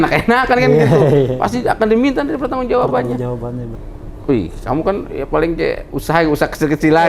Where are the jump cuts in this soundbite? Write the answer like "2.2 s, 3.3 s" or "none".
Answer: 3.7 s